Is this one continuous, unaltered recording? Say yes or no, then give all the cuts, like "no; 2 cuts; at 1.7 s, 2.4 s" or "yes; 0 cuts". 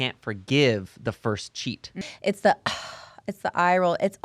no; 1 cut; at 2.0 s